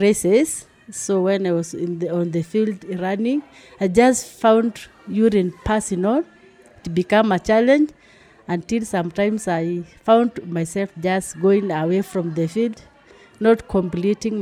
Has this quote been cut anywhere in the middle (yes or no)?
no